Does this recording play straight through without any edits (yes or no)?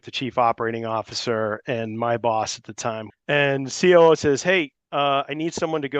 no